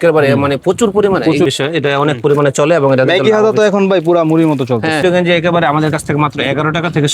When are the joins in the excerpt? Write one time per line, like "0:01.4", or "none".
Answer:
0:01.5
0:05.0